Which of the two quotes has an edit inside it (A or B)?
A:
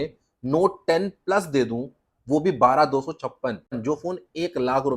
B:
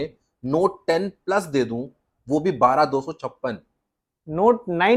A